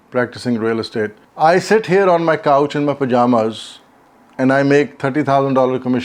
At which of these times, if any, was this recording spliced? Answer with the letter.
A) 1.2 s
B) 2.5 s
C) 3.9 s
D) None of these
A